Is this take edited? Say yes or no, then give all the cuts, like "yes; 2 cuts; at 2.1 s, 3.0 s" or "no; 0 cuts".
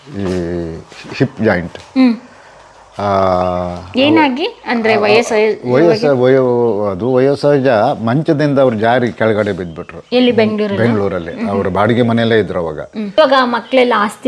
yes; 1 cut; at 13.1 s